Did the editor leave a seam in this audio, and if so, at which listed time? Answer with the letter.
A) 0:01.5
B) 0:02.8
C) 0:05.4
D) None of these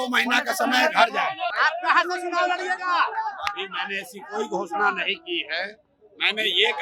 A